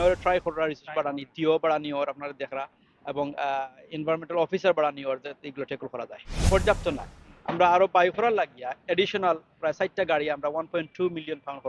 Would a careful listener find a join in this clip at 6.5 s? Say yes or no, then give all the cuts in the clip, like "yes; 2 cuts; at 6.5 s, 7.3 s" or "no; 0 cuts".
yes; 1 cut; at 6.5 s